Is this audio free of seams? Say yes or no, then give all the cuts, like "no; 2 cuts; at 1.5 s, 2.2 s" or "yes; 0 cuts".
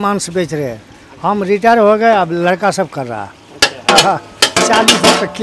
yes; 0 cuts